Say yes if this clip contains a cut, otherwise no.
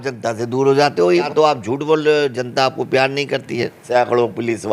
yes